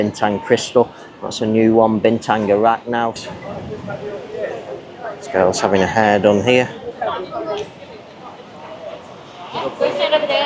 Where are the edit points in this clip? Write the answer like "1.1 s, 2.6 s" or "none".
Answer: 3.2 s